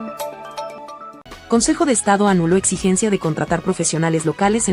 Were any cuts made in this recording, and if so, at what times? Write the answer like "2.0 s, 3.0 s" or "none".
1.1 s